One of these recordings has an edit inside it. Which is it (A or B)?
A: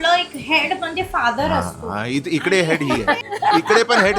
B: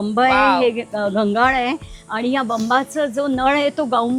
A